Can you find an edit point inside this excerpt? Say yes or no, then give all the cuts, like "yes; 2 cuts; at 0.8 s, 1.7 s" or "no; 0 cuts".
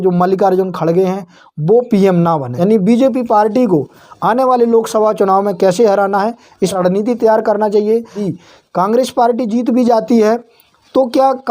yes; 3 cuts; at 2.5 s, 6.8 s, 8.2 s